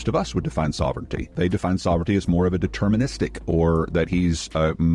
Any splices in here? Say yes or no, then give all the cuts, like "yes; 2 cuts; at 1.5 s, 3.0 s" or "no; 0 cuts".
no; 0 cuts